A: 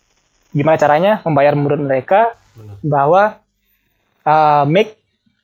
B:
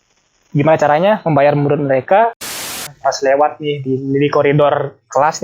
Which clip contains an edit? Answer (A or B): B